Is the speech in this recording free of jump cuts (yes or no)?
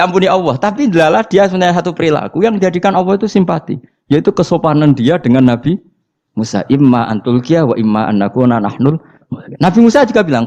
yes